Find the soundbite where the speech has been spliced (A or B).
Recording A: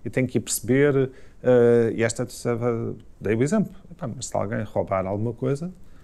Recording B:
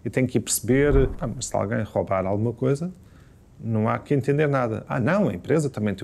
B